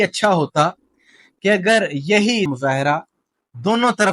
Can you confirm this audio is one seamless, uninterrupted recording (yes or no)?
no